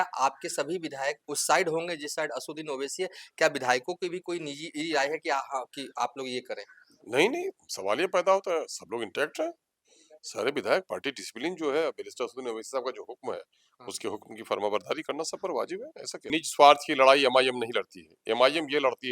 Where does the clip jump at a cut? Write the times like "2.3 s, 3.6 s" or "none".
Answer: 16.2 s